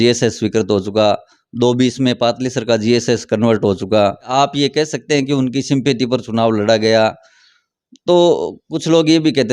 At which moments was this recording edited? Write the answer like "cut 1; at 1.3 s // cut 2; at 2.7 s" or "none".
cut 1; at 4.3 s